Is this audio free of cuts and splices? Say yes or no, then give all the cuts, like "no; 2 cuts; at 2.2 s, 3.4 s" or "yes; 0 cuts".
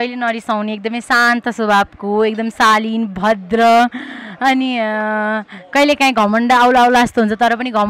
yes; 0 cuts